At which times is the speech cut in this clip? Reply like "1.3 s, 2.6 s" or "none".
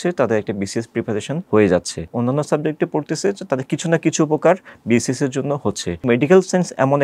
1.4 s, 2.1 s, 6.0 s